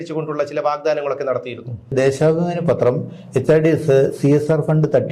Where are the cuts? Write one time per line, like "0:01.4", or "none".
0:01.9